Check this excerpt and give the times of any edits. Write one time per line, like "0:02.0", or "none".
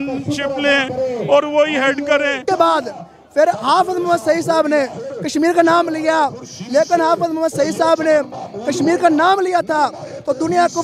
0:02.4